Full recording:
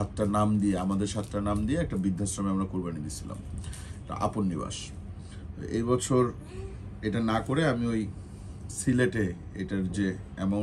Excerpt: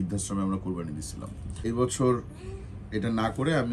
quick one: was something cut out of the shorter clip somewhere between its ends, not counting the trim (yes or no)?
yes